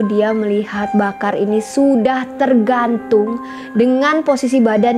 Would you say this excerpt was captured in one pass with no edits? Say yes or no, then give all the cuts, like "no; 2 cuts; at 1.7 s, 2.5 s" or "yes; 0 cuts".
yes; 0 cuts